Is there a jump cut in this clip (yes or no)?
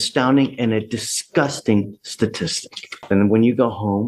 yes